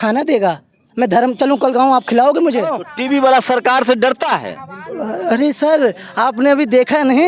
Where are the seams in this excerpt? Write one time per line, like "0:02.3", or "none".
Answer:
0:02.9